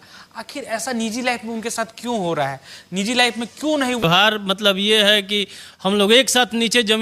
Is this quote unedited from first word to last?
no; 1 cut; at 4.0 s

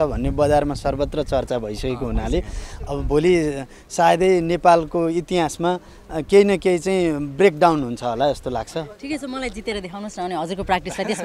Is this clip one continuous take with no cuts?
yes; 0 cuts

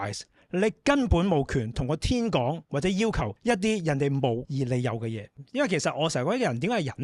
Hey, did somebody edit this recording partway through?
yes; 2 cuts; at 3.3 s, 5.0 s

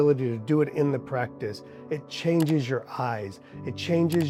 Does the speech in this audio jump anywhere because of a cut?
no; 0 cuts

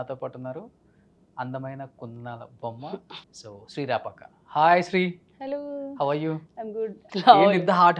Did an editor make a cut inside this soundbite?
yes; 2 cuts; at 3.2 s, 7.1 s

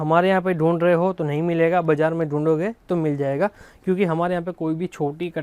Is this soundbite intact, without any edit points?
yes; 0 cuts

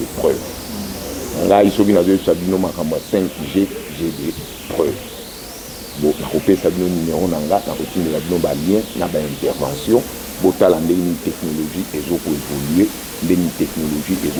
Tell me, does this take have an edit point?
no; 0 cuts

